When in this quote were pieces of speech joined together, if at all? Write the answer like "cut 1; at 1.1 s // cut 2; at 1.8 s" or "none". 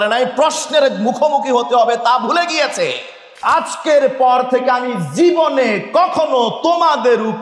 cut 1; at 3.4 s